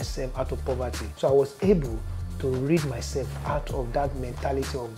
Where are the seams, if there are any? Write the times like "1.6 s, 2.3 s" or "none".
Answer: 1.0 s